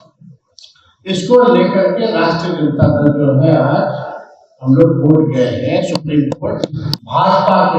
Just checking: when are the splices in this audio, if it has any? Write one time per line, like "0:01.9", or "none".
0:06.9